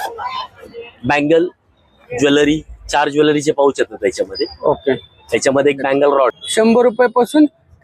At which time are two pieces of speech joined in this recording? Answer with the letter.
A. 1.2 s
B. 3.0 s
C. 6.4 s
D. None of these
C